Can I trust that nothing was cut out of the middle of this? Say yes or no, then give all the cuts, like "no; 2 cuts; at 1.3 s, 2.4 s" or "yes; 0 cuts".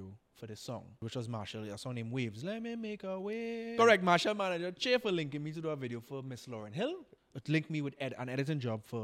no; 3 cuts; at 1.0 s, 3.7 s, 7.2 s